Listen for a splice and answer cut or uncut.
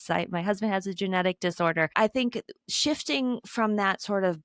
cut